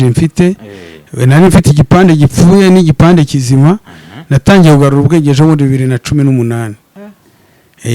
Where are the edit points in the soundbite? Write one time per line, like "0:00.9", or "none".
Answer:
none